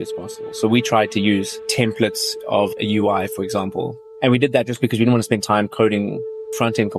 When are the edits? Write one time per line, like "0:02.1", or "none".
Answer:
0:04.0